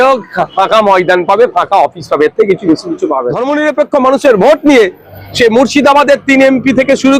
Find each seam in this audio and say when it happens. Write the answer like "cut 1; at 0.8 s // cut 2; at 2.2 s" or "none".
cut 1; at 3.3 s